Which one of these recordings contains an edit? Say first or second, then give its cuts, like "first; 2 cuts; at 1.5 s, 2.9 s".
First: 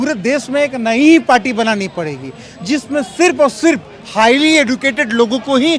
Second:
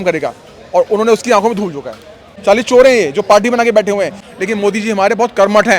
second; 2 cuts; at 2.3 s, 4.2 s